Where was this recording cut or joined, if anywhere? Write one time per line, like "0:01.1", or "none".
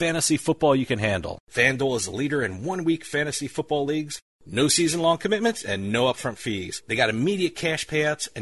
0:01.4